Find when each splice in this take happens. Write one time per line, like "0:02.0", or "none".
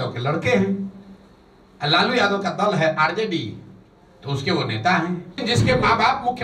0:05.4